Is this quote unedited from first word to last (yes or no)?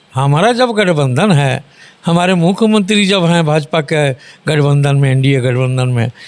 yes